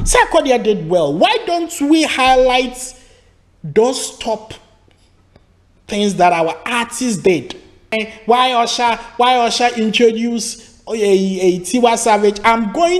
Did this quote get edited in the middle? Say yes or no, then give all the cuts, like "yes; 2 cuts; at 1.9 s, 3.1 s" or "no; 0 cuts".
yes; 1 cut; at 7.9 s